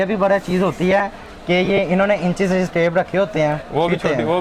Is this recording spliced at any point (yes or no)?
no